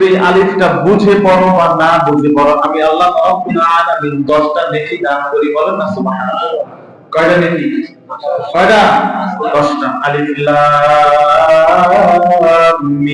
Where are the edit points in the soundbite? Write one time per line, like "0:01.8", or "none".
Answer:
none